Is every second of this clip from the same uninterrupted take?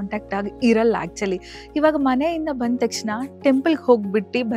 yes; 0 cuts

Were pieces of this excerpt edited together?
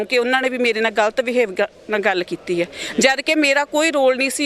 no; 0 cuts

